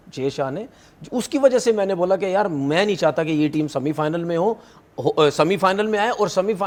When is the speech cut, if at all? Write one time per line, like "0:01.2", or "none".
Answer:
none

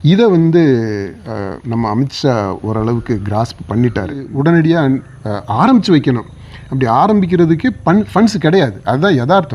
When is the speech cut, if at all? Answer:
0:04.2

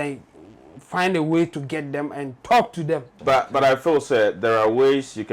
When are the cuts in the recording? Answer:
0:03.1

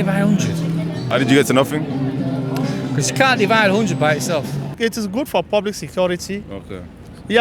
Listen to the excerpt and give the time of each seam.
0:01.0
0:04.7

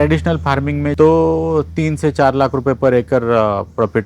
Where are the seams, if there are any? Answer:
0:00.9

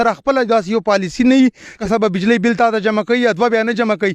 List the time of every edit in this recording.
0:01.8

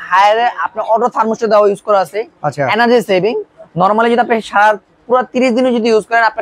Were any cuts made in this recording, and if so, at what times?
none

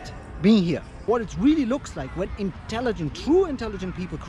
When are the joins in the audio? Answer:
0:00.9

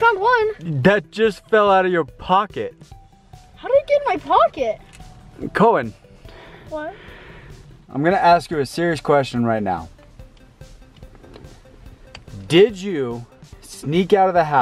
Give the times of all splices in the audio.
0:07.8

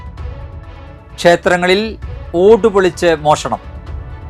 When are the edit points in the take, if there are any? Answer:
0:01.1

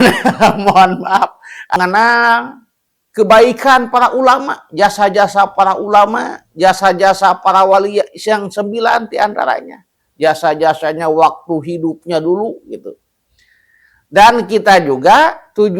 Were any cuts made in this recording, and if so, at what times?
0:01.7

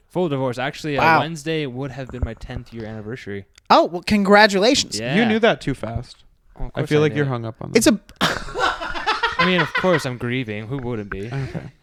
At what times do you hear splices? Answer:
none

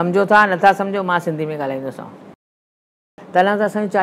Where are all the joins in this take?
0:02.9

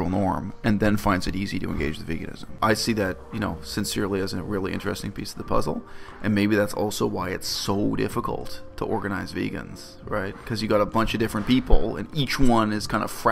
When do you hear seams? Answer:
0:02.6

